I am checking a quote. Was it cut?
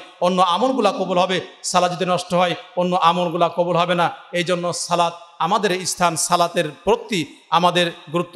no; 0 cuts

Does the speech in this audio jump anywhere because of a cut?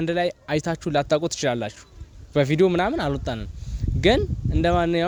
no; 0 cuts

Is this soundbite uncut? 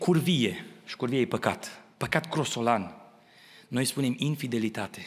yes; 0 cuts

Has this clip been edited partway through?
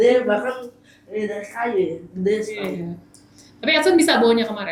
no; 0 cuts

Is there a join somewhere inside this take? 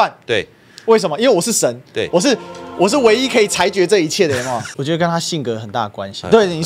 yes; 1 cut; at 4.7 s

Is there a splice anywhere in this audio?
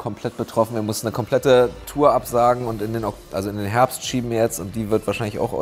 no; 0 cuts

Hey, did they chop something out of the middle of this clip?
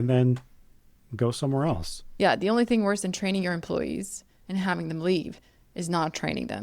yes; 1 cut; at 2.0 s

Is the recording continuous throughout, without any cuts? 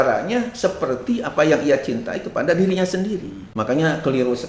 no; 1 cut; at 3.4 s

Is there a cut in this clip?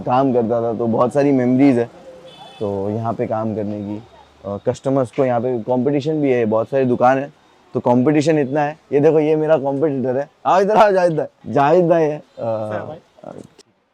no; 0 cuts

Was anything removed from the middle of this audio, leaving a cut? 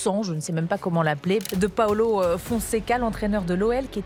no; 0 cuts

